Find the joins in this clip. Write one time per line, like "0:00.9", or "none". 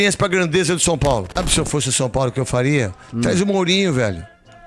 0:01.4

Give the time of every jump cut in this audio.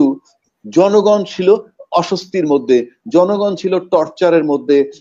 none

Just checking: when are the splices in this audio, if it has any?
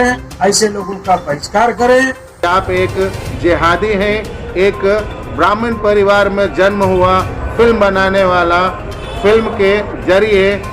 0:02.4

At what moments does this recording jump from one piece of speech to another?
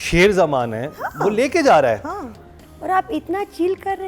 0:02.4

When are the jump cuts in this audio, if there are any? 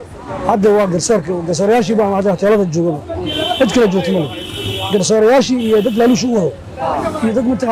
none

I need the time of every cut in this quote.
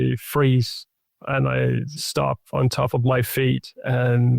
0:01.9

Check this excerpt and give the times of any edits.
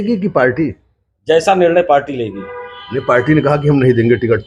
none

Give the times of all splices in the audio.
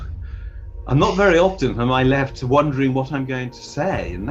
none

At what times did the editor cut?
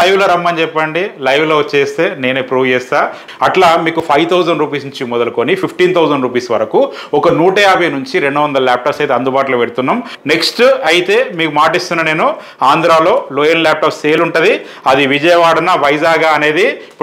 0:03.2
0:10.1

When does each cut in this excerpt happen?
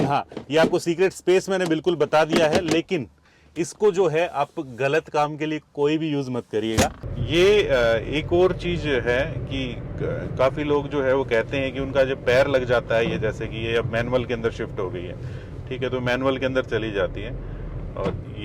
0:07.1

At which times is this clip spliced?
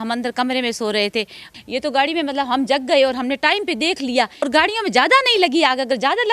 0:01.5
0:04.5

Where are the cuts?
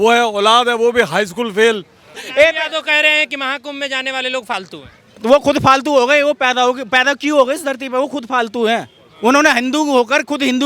0:02.2

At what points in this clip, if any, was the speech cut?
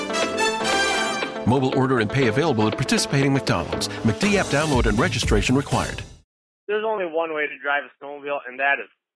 0:06.3

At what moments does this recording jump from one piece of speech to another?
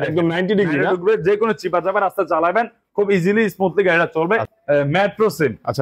0:04.4

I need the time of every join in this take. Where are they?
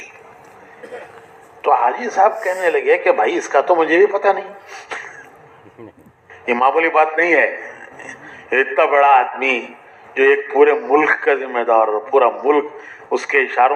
none

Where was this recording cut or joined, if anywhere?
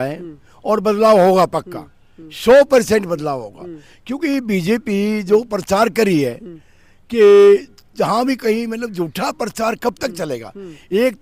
none

